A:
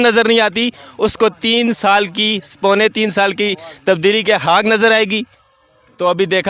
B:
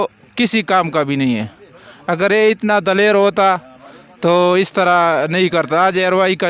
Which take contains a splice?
A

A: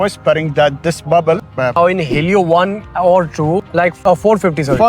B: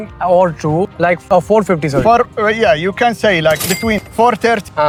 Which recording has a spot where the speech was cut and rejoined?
A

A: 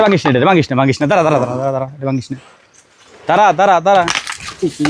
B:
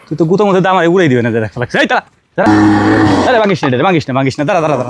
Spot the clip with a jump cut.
B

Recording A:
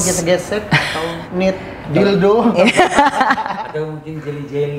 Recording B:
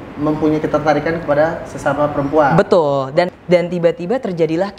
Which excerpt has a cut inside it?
B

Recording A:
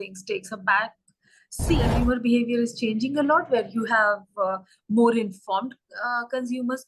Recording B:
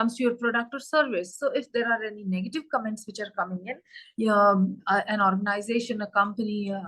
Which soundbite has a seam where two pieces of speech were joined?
A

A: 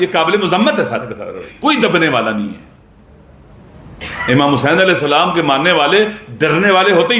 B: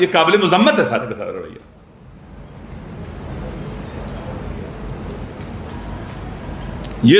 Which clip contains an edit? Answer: A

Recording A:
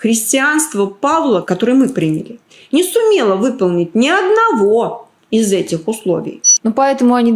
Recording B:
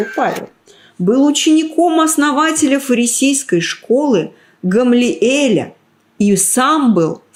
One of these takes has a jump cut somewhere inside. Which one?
A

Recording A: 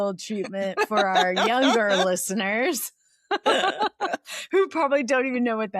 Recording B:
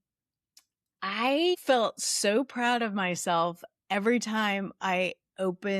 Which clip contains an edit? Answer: B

